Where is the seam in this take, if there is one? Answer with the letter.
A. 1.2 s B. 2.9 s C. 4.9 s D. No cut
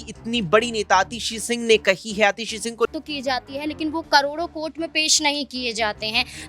B